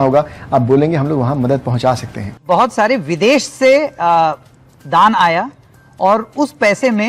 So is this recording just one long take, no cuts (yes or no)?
no